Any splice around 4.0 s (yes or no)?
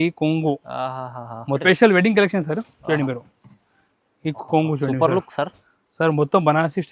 no